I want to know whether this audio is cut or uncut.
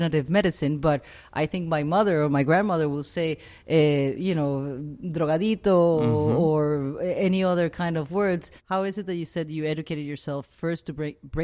cut